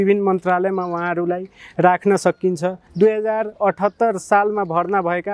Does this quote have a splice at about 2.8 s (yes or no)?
yes